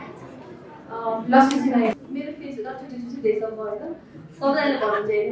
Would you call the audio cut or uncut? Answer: cut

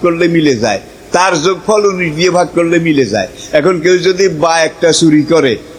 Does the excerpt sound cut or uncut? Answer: uncut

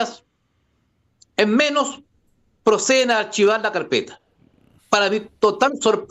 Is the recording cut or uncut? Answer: uncut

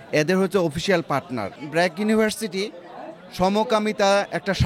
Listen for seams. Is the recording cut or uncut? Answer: cut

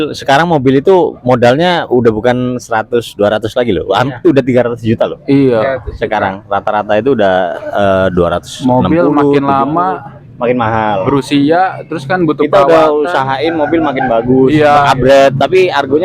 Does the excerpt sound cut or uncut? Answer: uncut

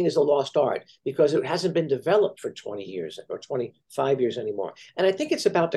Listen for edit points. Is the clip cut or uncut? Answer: uncut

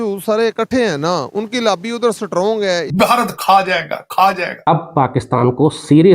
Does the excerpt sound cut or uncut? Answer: cut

